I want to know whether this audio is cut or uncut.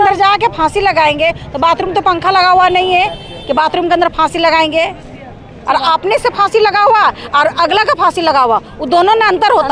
uncut